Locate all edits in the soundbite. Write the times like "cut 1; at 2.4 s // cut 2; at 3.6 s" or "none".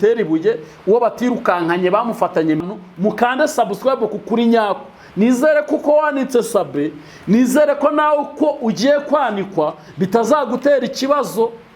cut 1; at 2.6 s